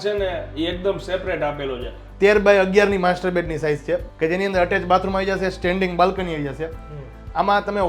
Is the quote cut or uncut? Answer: cut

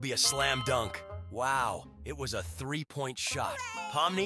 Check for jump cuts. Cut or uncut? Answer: uncut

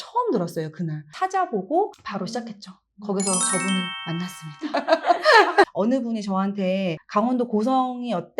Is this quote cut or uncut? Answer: cut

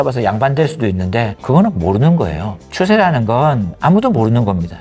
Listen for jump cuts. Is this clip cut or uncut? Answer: uncut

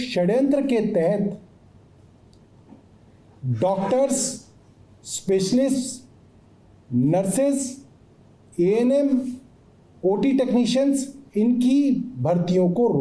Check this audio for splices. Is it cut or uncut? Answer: uncut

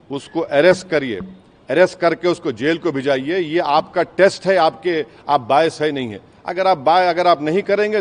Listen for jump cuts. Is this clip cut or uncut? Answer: uncut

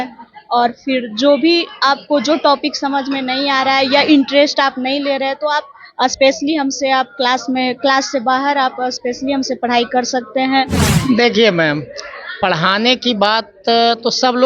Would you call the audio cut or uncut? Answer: cut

